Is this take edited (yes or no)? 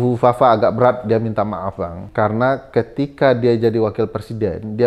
yes